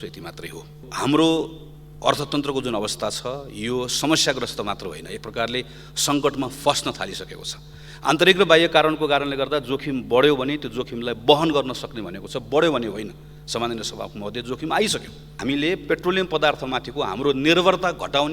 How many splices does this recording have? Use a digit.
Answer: 2